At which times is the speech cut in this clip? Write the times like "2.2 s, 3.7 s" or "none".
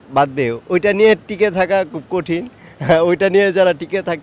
none